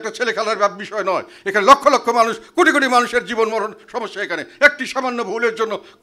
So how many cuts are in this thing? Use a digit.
0